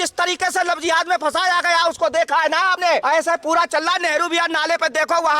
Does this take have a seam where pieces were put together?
yes; 1 cut; at 2.8 s

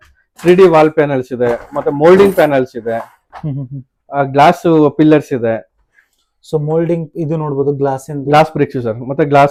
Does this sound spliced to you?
no; 0 cuts

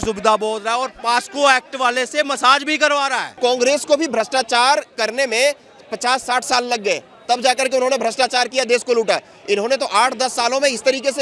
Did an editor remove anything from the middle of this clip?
yes; 1 cut; at 3.4 s

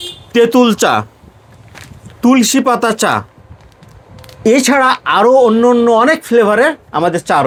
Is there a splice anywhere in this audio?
no; 0 cuts

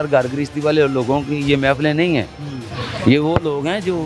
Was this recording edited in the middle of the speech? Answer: no; 0 cuts

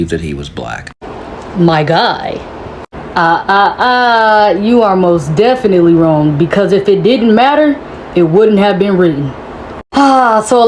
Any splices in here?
yes; 1 cut; at 1.1 s

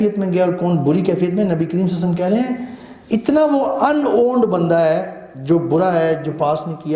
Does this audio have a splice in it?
no; 0 cuts

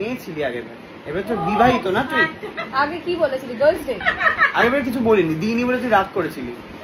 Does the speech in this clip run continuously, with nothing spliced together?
yes; 0 cuts

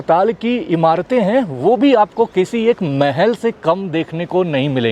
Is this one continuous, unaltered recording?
yes; 0 cuts

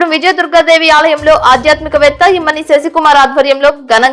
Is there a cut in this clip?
no; 0 cuts

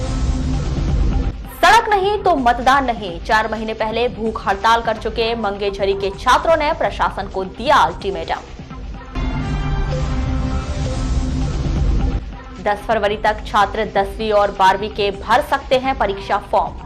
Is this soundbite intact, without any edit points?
no; 1 cut; at 1.3 s

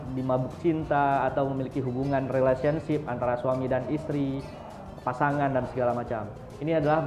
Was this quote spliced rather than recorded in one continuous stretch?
no; 0 cuts

